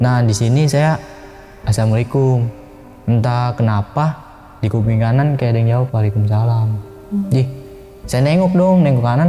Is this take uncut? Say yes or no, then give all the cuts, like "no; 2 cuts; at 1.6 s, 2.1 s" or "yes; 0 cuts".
yes; 0 cuts